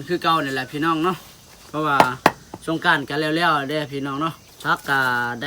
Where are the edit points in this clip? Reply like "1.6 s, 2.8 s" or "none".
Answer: 4.5 s